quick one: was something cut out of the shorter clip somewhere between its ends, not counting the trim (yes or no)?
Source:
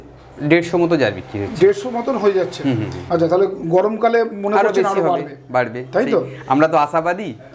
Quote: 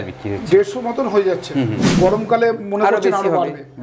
yes